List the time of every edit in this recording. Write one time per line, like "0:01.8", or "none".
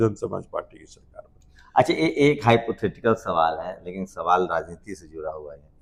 none